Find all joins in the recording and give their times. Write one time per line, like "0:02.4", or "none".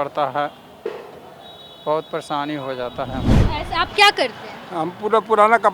0:03.4

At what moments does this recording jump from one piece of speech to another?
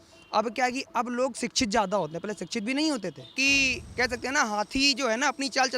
0:03.3

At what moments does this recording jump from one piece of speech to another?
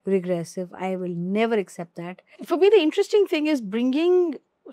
0:02.3

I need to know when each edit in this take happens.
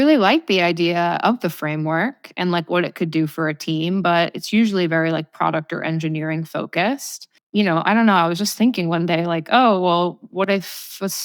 0:07.3

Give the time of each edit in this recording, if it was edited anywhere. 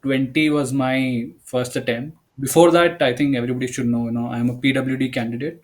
0:02.3

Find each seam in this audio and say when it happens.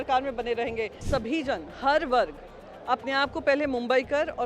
0:01.0

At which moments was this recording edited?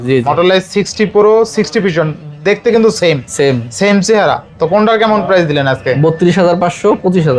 none

